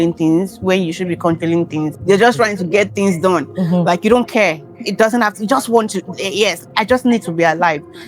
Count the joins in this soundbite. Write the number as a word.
one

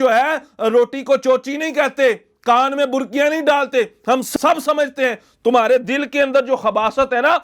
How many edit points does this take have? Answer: zero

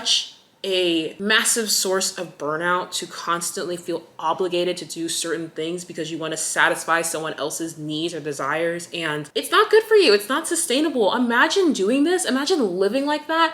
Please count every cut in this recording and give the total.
one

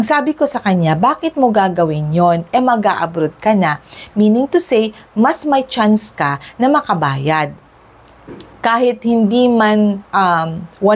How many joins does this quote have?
zero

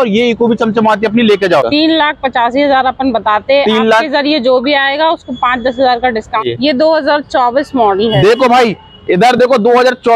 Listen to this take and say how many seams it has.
two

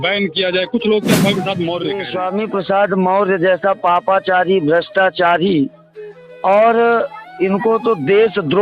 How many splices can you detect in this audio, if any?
one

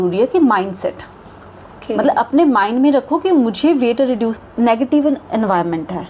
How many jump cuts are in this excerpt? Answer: one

